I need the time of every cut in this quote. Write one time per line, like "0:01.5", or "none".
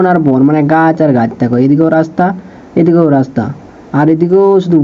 none